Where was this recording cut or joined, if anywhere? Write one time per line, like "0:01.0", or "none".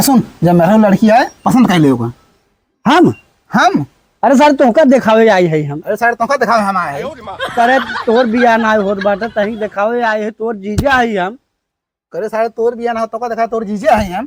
none